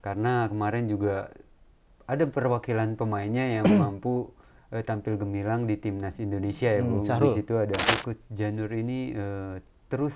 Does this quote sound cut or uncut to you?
cut